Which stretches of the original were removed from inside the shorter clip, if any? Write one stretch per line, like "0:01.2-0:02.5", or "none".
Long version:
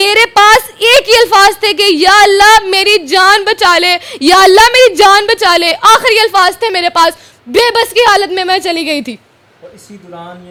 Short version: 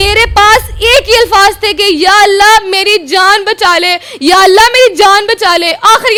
none